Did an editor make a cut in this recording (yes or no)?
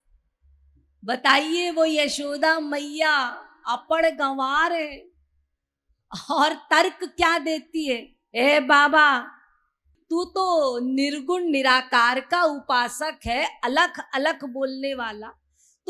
yes